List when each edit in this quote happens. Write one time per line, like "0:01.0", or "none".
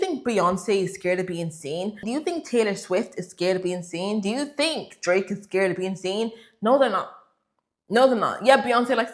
0:02.0